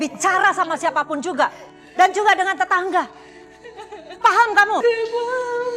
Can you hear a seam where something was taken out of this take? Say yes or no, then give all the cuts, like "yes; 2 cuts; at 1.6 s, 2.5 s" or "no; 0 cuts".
yes; 1 cut; at 4.8 s